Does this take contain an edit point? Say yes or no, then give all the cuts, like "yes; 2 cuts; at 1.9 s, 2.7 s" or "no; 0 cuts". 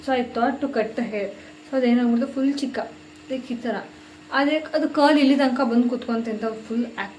no; 0 cuts